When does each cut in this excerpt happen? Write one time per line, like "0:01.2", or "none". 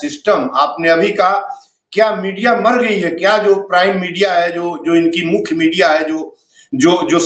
none